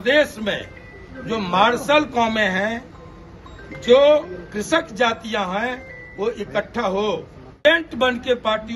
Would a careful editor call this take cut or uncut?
cut